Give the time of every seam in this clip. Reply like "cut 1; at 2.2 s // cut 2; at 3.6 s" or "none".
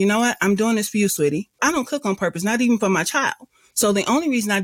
cut 1; at 1.5 s